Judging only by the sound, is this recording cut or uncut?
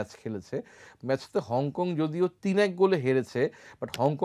uncut